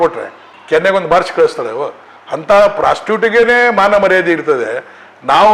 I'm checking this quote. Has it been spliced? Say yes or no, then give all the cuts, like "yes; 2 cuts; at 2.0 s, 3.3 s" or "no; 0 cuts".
no; 0 cuts